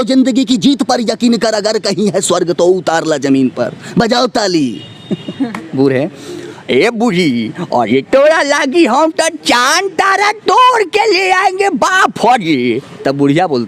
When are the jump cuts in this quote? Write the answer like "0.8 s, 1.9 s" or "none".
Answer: 5.6 s